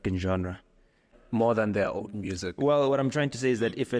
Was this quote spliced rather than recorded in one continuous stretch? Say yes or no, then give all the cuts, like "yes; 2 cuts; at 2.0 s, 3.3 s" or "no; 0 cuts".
yes; 1 cut; at 1.2 s